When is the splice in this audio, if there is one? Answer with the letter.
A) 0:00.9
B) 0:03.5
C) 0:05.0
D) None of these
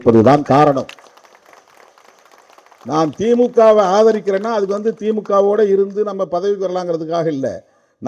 D